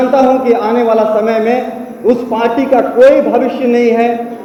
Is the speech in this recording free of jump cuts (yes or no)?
yes